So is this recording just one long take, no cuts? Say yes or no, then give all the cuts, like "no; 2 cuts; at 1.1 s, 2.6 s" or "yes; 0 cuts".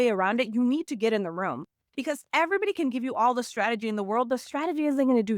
no; 1 cut; at 2.3 s